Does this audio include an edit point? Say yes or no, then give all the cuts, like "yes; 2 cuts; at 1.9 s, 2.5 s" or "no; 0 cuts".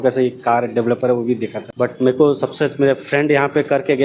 yes; 1 cut; at 1.6 s